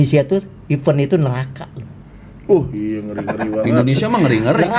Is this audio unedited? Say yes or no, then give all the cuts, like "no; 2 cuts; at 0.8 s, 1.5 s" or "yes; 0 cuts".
yes; 0 cuts